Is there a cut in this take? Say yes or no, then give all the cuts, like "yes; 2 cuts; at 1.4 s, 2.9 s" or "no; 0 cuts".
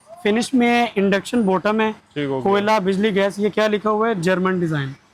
no; 0 cuts